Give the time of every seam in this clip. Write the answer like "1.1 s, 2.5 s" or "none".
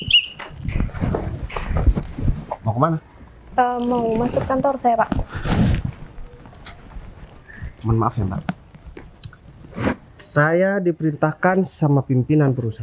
none